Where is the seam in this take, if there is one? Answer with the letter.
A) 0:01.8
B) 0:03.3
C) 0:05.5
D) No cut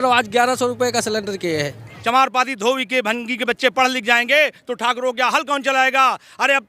A